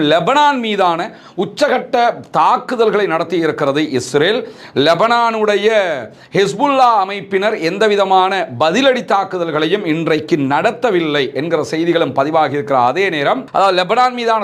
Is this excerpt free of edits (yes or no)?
no